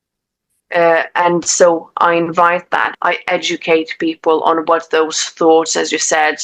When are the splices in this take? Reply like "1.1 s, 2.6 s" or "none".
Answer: 2.9 s